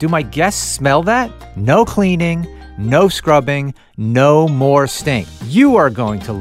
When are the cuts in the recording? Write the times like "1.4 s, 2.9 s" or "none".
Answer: 1.5 s, 5.3 s